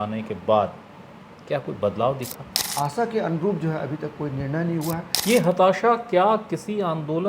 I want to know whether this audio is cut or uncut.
cut